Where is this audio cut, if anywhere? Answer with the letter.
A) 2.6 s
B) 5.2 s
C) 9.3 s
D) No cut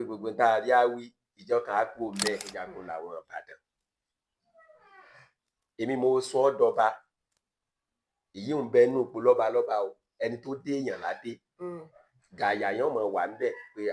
A